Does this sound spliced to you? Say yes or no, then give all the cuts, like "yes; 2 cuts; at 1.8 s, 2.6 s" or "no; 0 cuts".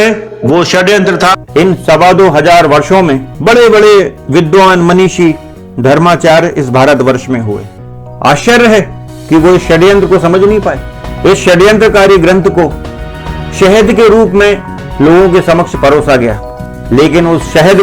yes; 1 cut; at 1.4 s